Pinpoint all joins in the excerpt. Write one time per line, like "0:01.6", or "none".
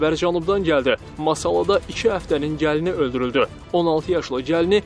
none